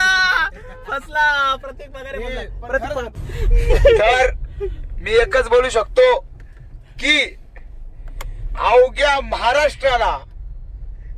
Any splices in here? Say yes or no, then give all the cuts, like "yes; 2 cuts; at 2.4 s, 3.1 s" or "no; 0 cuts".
yes; 1 cut; at 3.2 s